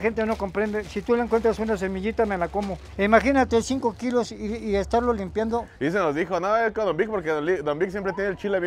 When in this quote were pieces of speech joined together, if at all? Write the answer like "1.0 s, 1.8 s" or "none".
2.9 s, 5.7 s